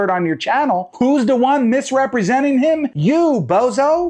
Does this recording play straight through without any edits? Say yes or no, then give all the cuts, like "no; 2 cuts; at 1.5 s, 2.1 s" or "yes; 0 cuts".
yes; 0 cuts